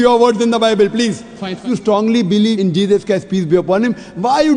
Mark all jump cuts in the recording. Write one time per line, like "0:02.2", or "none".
0:01.6

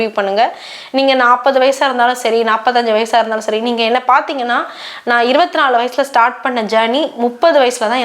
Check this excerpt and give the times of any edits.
none

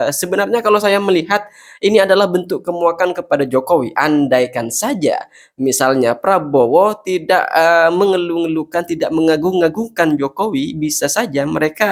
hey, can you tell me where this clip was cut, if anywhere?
none

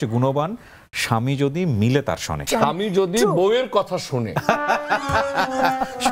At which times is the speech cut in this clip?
0:02.4

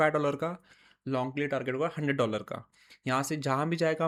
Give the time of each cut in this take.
none

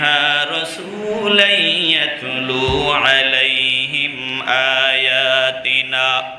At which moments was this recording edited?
none

